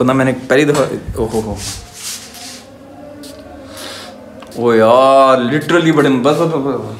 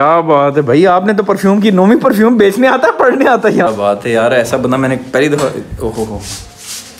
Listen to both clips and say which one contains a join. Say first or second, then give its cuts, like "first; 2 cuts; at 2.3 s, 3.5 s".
second; 1 cut; at 3.7 s